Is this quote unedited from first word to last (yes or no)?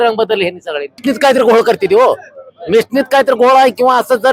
no